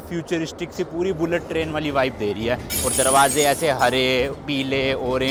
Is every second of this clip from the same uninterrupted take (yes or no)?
yes